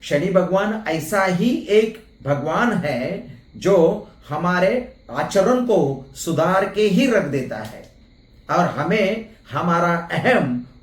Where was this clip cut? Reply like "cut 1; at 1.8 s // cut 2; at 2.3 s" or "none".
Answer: none